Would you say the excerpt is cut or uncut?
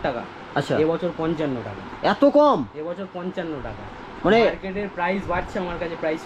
uncut